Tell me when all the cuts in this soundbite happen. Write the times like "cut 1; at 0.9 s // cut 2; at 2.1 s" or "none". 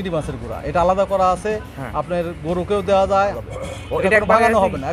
cut 1; at 3.4 s